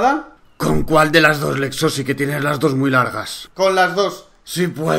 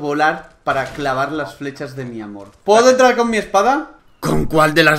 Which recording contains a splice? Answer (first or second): second